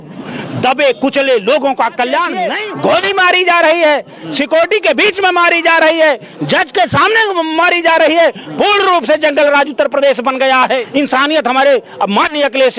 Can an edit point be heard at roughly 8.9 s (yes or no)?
no